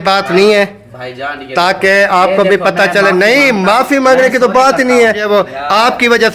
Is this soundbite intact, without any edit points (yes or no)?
no